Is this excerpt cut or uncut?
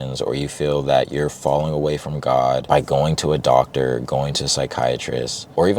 cut